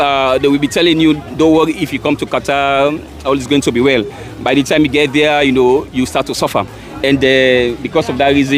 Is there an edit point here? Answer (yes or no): no